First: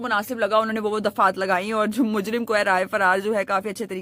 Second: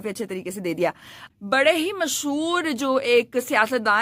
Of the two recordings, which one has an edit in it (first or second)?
second